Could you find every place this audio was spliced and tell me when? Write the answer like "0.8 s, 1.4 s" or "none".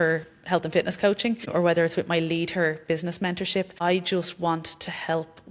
1.5 s, 3.7 s